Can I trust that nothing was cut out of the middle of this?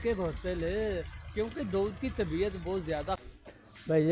no; 1 cut; at 3.1 s

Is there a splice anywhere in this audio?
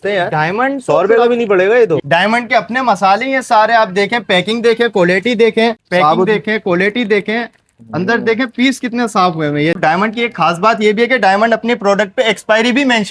yes; 3 cuts; at 2.0 s, 5.8 s, 9.8 s

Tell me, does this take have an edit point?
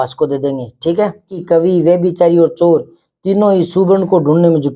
yes; 1 cut; at 1.4 s

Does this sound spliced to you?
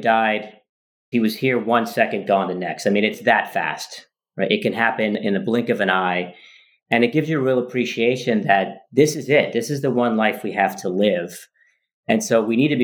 yes; 2 cuts; at 3.2 s, 5.2 s

